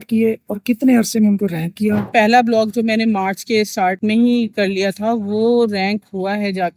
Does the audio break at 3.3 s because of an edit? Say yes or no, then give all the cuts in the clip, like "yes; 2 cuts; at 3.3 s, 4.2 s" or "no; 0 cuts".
no; 1 cut; at 2.1 s